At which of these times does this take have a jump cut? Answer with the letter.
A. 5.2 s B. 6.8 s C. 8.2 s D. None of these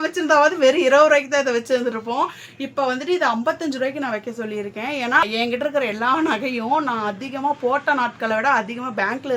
A